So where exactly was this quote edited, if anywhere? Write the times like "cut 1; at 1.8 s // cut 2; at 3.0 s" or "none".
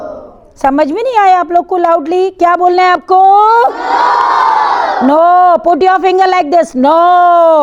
none